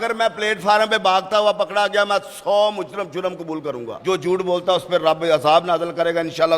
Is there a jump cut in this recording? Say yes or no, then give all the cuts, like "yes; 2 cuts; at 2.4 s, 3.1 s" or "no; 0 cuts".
yes; 1 cut; at 3.9 s